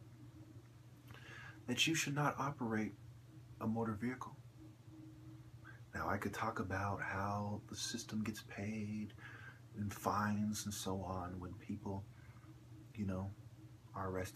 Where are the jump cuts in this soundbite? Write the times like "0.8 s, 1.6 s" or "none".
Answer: 6.5 s

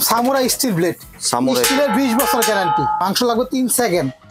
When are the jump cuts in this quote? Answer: 3.0 s

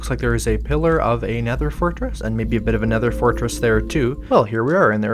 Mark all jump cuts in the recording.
4.2 s

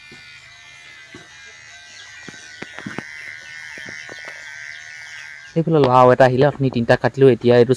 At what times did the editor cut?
5.5 s

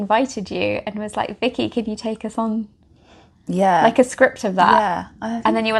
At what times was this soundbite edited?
none

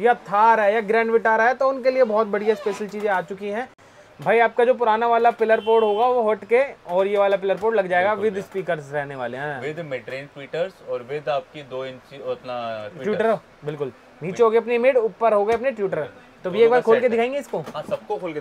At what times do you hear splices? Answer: none

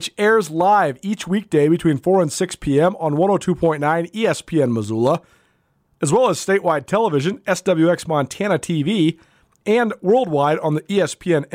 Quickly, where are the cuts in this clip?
none

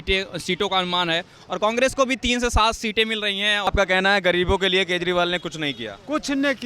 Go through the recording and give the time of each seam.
3.7 s

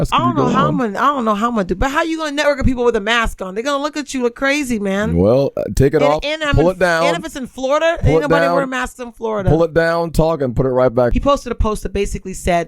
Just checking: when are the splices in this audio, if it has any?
11.1 s

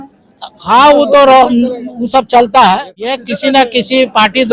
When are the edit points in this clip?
2.9 s

